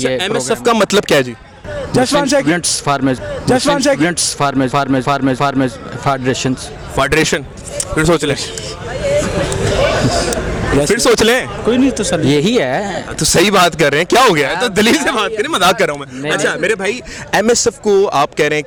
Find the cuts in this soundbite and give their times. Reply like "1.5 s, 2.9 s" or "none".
none